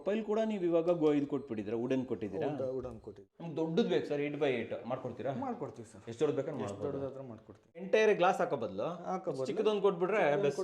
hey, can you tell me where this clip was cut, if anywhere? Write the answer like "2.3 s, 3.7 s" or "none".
3.3 s, 7.8 s

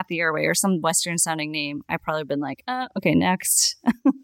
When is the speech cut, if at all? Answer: none

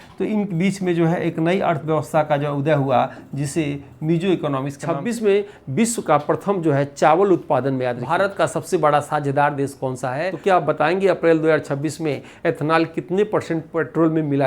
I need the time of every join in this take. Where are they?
4.7 s, 8.0 s, 10.3 s

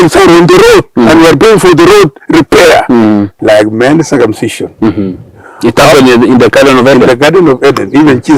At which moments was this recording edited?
3.3 s

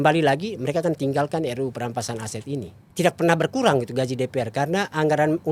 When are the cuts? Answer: 2.8 s

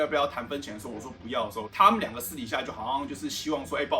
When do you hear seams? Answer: 2.7 s

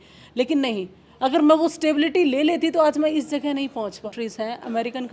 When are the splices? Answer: 4.1 s

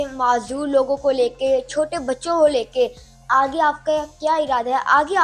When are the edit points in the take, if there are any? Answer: none

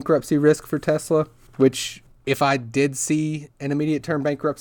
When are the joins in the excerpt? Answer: none

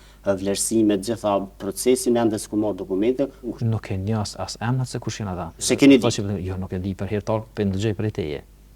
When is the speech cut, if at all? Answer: 3.6 s, 5.7 s

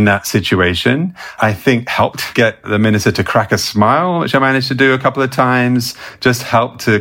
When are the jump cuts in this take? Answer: 2.3 s

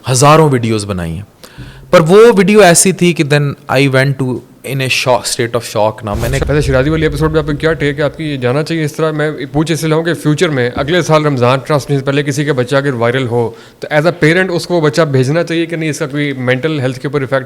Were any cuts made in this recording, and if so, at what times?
6.4 s

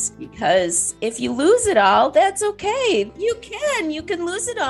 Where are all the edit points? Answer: 3.1 s

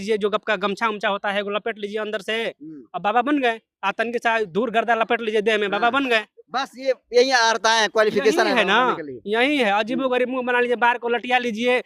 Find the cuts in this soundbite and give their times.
none

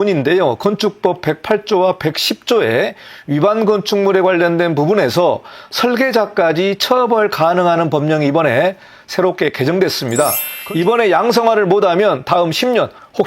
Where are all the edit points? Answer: 10.5 s

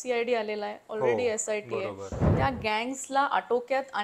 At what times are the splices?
2.2 s

